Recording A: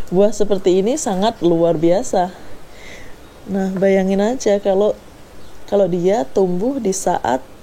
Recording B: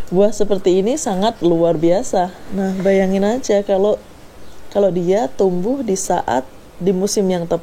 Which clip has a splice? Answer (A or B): B